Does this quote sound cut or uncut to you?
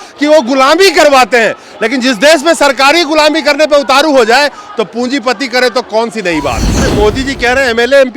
cut